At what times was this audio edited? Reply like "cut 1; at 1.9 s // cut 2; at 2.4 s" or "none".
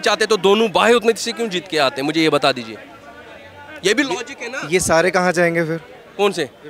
none